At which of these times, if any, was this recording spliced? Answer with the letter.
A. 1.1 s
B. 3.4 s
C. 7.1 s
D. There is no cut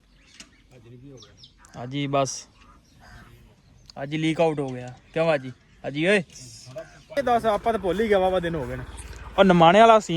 C